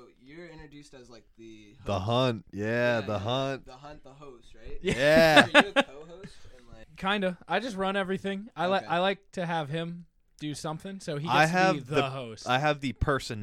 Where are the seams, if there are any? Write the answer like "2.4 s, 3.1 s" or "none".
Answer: 6.9 s

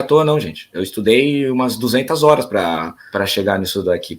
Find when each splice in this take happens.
3.0 s

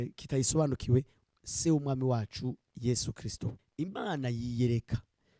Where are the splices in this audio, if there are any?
3.6 s

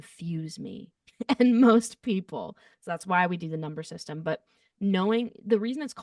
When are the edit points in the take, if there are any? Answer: none

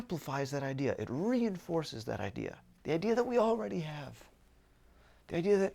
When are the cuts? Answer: 2.7 s

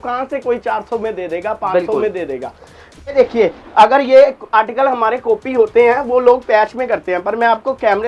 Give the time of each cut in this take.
3.1 s

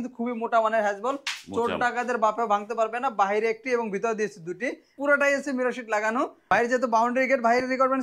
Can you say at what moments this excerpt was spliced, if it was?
4.9 s, 6.4 s

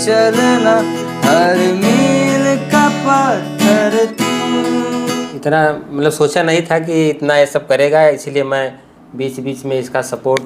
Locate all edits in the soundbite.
5.1 s

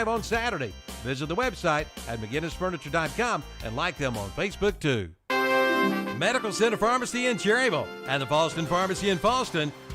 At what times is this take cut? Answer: 5.1 s

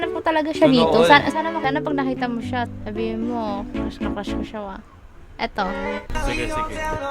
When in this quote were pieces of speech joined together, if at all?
1.6 s

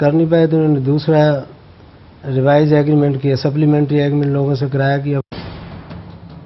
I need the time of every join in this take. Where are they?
5.2 s

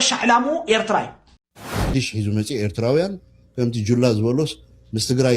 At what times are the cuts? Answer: 1.7 s

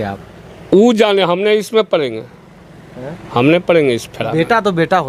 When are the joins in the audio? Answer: none

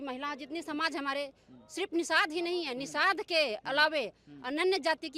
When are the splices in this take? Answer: none

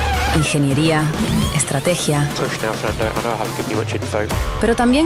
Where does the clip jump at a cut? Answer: none

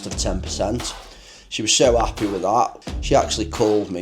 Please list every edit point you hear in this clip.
2.9 s

